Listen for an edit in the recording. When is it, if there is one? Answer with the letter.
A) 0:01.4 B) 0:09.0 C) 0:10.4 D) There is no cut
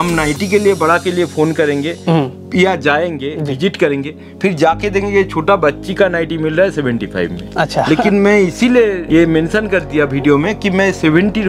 B